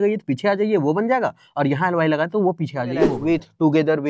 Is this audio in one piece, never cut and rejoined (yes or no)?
no